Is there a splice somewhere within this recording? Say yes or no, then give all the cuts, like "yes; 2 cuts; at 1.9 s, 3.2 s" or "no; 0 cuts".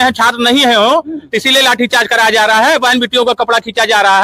no; 0 cuts